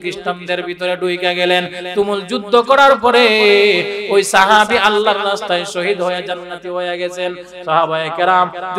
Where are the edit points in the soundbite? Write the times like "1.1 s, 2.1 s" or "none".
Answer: 6.4 s